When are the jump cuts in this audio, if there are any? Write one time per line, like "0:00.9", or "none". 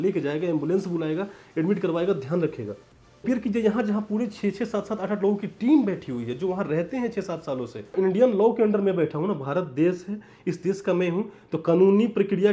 0:03.2
0:07.9